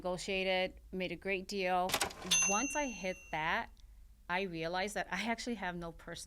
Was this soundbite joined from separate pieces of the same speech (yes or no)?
yes